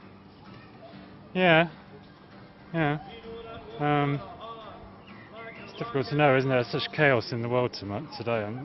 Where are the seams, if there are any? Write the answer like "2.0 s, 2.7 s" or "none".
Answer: 3.3 s